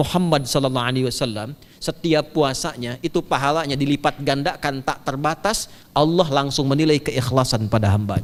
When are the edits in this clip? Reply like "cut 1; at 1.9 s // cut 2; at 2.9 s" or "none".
none